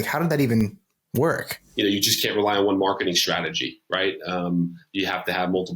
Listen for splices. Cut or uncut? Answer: cut